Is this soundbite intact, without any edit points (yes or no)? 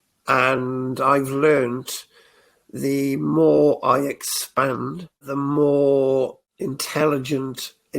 no